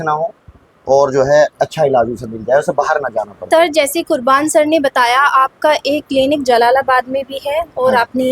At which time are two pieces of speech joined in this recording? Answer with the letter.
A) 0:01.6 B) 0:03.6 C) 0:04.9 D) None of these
B